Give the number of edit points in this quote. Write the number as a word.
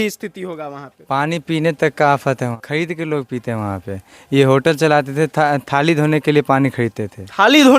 one